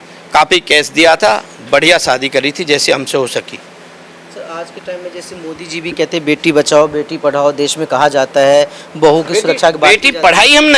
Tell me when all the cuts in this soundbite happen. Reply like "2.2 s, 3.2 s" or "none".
none